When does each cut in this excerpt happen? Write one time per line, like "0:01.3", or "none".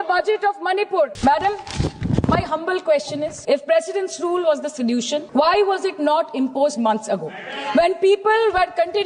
0:01.1
0:03.3
0:05.3